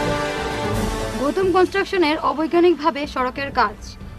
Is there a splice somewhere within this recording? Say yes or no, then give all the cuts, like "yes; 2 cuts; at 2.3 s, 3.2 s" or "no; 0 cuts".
yes; 1 cut; at 0.9 s